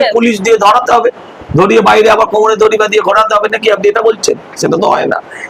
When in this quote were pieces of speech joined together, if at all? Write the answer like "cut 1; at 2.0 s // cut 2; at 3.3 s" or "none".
none